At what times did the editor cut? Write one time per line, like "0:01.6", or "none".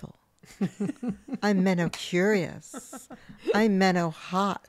none